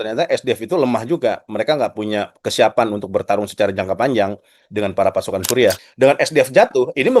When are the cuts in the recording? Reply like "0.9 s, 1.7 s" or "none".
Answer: 5.8 s